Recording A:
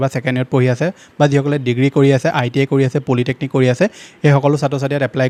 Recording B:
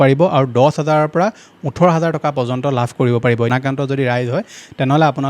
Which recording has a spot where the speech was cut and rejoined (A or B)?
B